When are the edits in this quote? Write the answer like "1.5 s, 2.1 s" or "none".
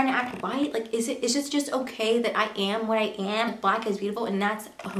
3.5 s